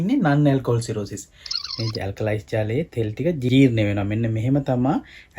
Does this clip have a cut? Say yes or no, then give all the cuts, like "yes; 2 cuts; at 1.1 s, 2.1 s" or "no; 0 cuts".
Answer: yes; 1 cut; at 1.7 s